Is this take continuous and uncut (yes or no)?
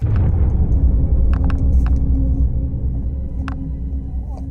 yes